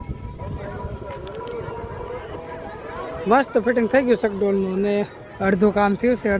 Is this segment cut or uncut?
cut